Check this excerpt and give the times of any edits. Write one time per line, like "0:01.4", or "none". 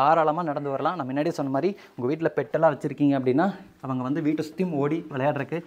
none